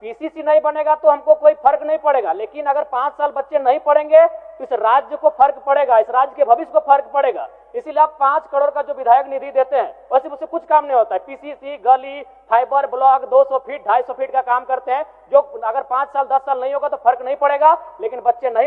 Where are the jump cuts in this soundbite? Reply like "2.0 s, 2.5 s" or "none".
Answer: none